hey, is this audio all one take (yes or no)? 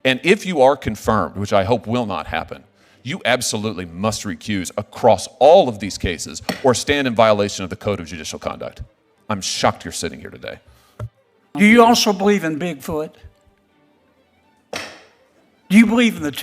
no